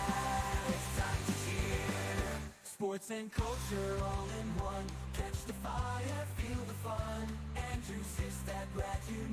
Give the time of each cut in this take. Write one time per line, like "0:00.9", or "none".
none